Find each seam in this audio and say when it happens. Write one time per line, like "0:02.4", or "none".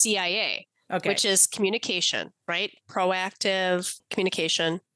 0:04.0